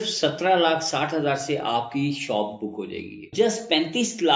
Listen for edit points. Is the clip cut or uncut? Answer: cut